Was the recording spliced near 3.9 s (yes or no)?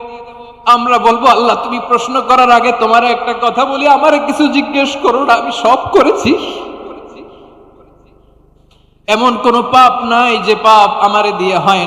no